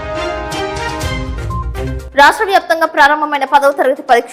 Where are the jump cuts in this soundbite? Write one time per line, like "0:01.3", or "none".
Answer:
none